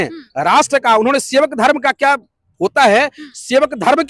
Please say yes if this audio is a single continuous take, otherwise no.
yes